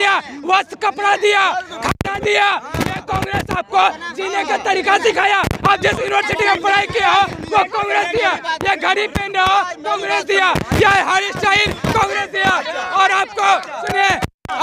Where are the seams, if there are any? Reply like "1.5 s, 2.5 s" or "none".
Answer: none